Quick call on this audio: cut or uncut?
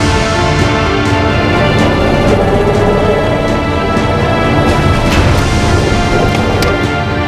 uncut